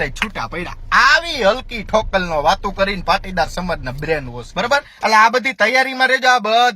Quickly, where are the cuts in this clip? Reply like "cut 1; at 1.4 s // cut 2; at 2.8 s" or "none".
cut 1; at 4.4 s